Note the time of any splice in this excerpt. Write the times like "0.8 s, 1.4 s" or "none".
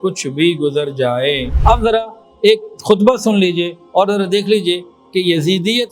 1.5 s